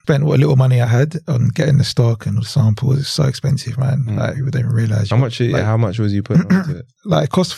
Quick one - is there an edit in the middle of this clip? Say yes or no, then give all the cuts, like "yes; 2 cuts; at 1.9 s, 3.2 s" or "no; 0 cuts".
no; 0 cuts